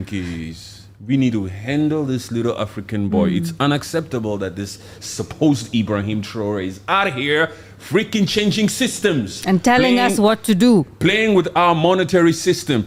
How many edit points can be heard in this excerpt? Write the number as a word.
zero